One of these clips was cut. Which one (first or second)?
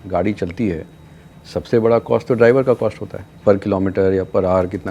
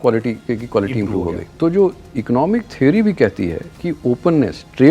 second